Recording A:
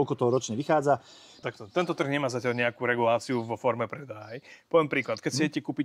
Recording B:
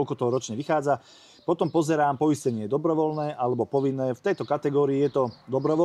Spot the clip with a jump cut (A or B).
A